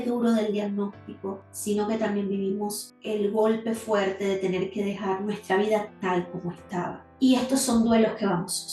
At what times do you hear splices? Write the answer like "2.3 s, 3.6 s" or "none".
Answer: none